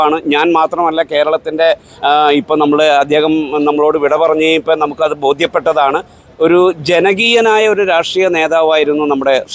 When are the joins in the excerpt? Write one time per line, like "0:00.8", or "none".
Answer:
none